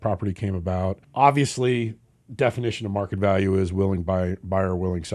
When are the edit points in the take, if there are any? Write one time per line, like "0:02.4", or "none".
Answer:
0:01.0